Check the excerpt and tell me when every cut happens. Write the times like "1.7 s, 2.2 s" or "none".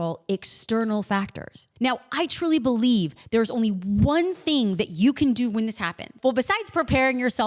6.1 s